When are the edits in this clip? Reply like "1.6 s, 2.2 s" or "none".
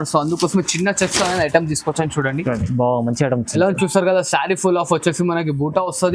none